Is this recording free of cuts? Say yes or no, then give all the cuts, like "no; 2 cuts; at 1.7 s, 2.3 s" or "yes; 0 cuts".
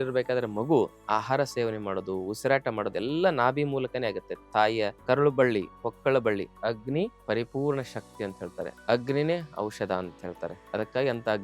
no; 4 cuts; at 5.0 s, 6.6 s, 8.8 s, 10.5 s